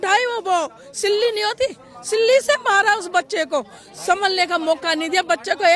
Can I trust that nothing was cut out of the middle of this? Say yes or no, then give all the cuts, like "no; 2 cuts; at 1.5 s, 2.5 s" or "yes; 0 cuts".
yes; 0 cuts